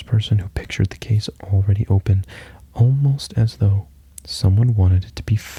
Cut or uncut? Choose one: uncut